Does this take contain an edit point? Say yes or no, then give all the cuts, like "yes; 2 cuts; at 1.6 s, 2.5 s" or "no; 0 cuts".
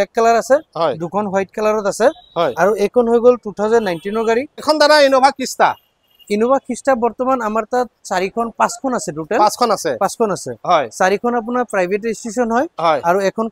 yes; 1 cut; at 4.6 s